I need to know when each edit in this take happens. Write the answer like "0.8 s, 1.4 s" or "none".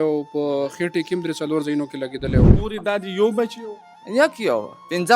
2.5 s